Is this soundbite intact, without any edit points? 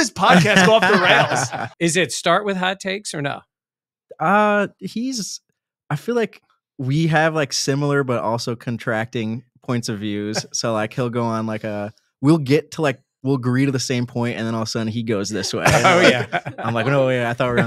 no; 1 cut; at 1.6 s

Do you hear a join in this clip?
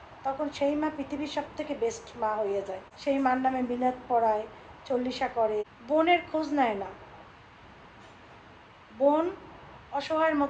yes; 2 cuts; at 2.9 s, 5.8 s

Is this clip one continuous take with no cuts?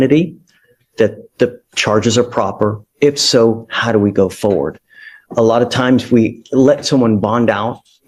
yes; 0 cuts

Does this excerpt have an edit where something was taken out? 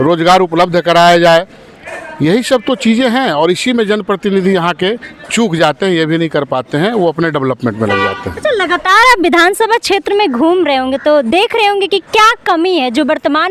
no; 0 cuts

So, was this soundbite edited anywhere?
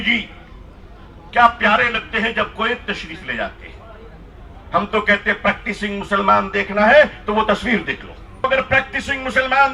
yes; 1 cut; at 8.4 s

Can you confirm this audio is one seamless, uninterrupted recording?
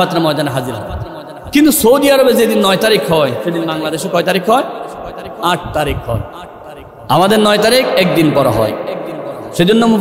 yes; 0 cuts

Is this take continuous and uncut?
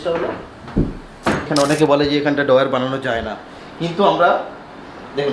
no; 1 cut; at 1.4 s

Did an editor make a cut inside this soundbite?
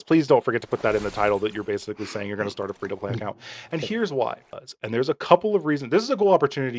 yes; 1 cut; at 4.5 s

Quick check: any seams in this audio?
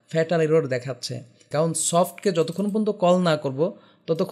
yes; 1 cut; at 1.4 s

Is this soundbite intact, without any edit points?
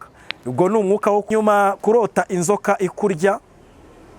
no; 1 cut; at 1.3 s

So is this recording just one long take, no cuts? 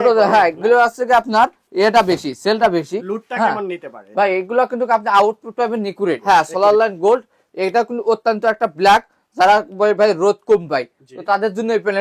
no; 1 cut; at 6.2 s

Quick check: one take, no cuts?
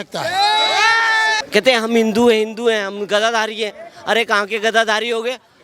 no; 1 cut; at 1.4 s

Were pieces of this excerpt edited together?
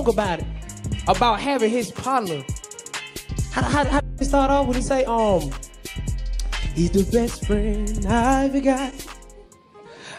no; 0 cuts

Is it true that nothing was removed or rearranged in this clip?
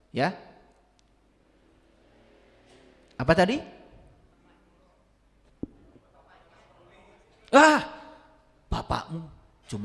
no; 1 cut; at 4.3 s

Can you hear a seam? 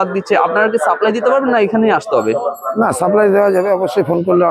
no; 0 cuts

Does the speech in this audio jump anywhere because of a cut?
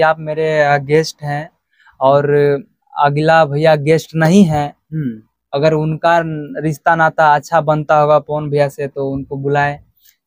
no; 0 cuts

